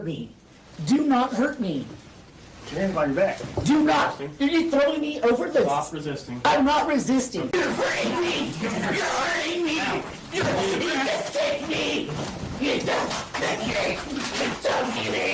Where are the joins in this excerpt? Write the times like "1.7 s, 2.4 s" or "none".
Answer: none